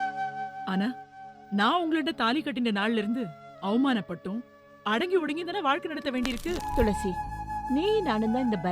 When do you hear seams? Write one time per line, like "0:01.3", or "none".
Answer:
0:06.6